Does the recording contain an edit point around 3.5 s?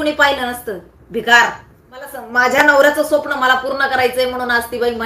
no; 1 cut; at 2.2 s

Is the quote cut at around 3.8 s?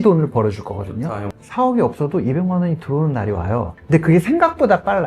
yes; 2 cuts; at 1.1 s, 3.8 s

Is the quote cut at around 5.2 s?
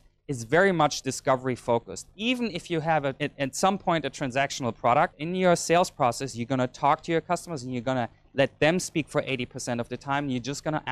yes; 3 cuts; at 1.1 s, 3.2 s, 5.2 s

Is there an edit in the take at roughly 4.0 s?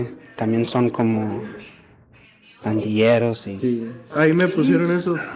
yes; 1 cut; at 4.0 s

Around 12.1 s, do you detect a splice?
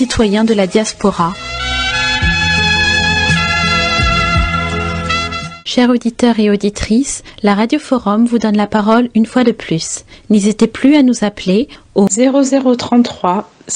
yes; 1 cut; at 12.1 s

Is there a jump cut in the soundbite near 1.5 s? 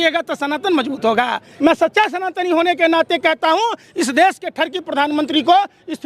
yes; 1 cut; at 1.5 s

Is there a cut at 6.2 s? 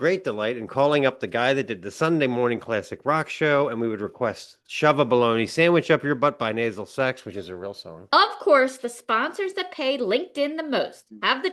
no; 1 cut; at 8.1 s

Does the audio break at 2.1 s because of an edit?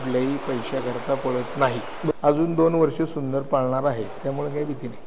yes; 1 cut; at 2.1 s

